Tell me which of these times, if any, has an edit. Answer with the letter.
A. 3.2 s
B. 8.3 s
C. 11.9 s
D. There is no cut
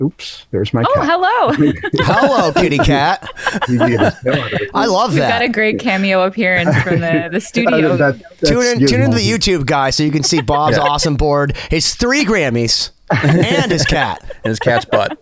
D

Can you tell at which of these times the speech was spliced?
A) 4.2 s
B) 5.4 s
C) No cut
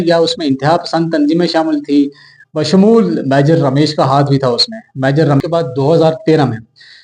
B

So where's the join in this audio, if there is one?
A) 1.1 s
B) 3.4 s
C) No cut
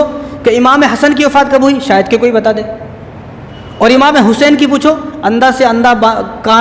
C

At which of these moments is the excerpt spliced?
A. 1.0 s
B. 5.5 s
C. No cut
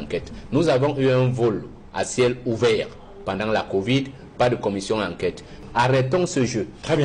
B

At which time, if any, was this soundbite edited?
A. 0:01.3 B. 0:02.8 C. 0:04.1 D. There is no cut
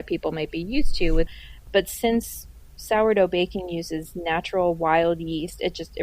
A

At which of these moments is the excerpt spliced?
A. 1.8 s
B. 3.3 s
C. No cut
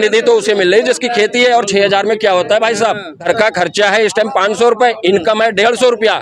B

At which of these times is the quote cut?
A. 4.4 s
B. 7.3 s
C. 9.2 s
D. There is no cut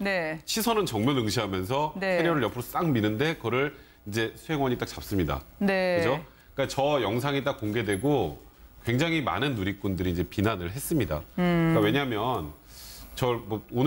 C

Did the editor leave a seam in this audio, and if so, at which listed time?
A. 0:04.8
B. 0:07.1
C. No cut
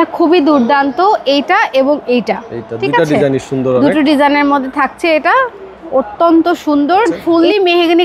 B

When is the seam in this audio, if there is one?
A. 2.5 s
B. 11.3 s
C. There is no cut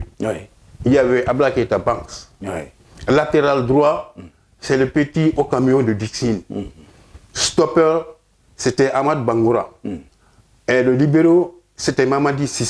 C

